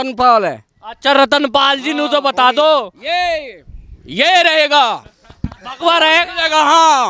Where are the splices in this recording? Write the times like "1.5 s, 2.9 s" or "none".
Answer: none